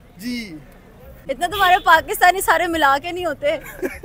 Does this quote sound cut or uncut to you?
cut